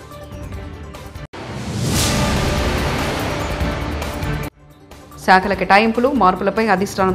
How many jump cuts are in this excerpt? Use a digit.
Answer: 2